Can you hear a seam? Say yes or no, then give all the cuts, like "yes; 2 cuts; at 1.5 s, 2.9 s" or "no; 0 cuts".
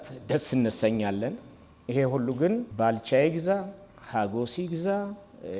yes; 1 cut; at 2.7 s